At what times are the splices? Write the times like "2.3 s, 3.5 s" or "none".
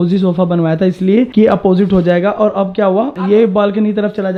none